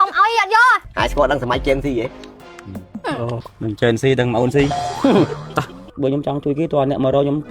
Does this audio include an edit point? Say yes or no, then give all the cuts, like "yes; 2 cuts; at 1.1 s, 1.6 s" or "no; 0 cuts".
yes; 1 cut; at 5.8 s